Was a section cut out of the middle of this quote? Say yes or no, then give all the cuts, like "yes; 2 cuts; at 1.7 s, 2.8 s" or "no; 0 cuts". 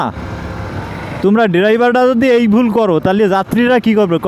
no; 0 cuts